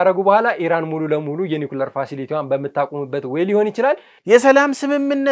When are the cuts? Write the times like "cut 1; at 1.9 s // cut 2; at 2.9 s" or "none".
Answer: cut 1; at 4.1 s